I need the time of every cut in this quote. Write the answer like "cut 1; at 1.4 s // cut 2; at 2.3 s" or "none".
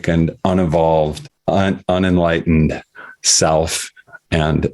cut 1; at 1.3 s